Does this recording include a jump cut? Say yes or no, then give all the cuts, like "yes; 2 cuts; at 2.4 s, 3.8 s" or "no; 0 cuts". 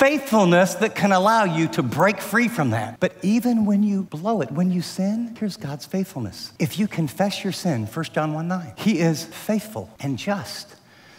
yes; 6 cuts; at 2.9 s, 4.1 s, 5.3 s, 6.4 s, 8.7 s, 9.3 s